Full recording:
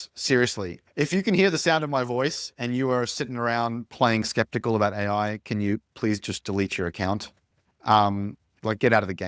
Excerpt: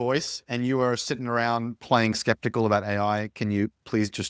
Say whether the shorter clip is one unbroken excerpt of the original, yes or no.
yes